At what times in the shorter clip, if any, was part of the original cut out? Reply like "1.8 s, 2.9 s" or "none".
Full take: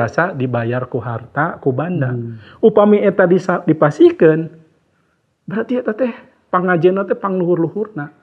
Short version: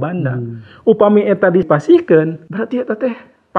1.7 s, 2.4 s